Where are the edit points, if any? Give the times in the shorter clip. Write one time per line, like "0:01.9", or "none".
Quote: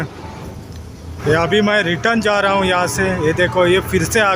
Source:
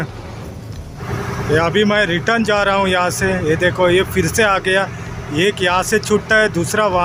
0:01.1